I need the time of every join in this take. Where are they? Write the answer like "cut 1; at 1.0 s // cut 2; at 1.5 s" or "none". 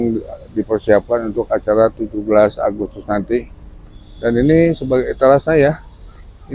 none